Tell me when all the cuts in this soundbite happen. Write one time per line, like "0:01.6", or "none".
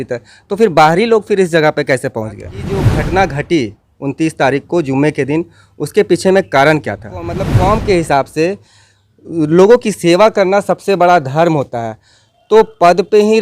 0:02.9
0:07.5

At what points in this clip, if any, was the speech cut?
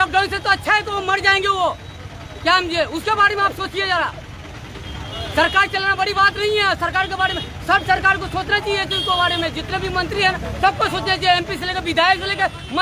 none

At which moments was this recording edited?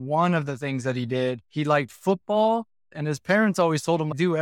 0:01.4
0:02.9

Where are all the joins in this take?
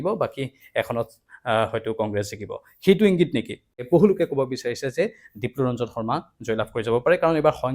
0:03.8

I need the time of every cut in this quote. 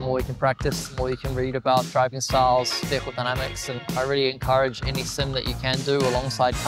0:03.9

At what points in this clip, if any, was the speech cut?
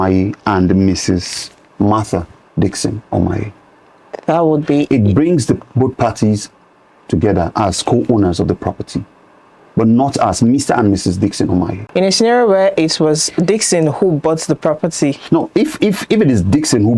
0:11.8

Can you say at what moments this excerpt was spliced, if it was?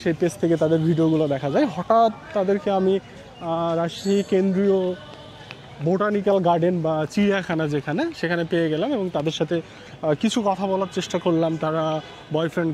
none

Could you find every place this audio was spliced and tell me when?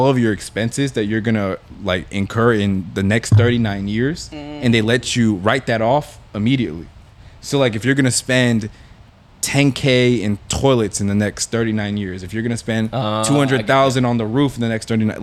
none

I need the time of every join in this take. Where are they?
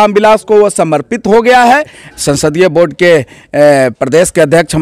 0:02.0

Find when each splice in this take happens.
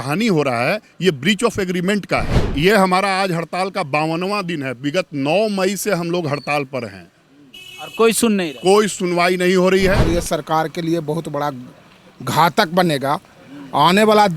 0:02.4
0:10.0

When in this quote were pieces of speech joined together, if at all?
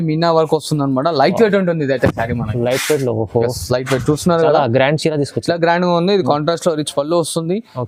none

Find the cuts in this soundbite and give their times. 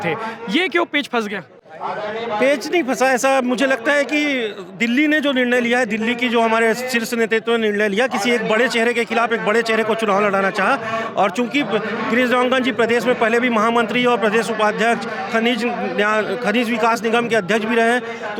none

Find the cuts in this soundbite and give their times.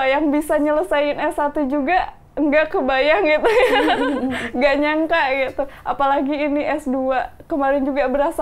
none

